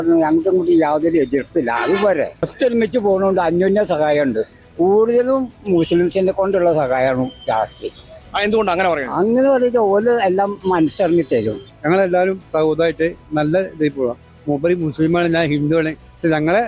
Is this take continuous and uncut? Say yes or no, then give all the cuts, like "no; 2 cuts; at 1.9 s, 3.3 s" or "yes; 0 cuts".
no; 2 cuts; at 2.5 s, 11.6 s